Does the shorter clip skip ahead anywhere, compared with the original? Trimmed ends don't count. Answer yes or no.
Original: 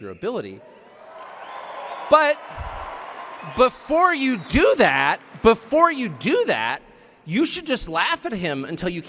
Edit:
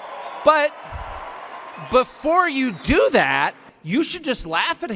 yes